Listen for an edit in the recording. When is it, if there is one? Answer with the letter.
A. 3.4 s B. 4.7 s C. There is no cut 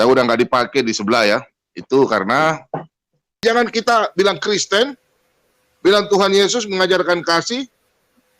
A